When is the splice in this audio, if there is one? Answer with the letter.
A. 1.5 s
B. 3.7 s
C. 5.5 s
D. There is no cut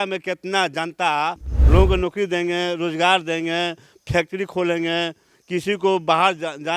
A